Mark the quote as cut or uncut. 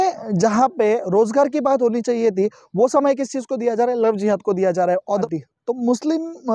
cut